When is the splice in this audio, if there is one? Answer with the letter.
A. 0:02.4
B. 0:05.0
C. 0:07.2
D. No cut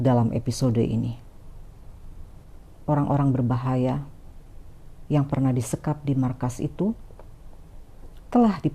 A